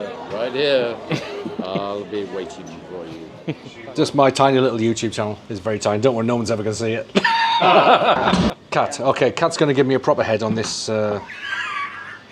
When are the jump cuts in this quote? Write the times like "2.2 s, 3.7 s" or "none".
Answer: 3.7 s, 8.3 s